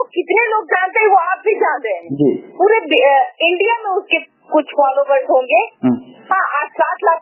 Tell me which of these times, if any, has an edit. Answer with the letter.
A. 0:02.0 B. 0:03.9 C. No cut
C